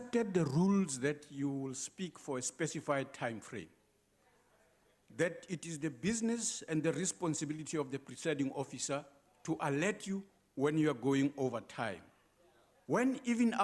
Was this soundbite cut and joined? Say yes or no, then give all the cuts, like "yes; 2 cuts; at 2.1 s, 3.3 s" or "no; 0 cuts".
yes; 1 cut; at 1.3 s